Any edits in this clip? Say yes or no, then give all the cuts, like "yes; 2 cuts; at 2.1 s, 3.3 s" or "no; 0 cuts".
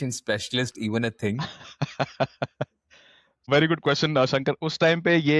no; 0 cuts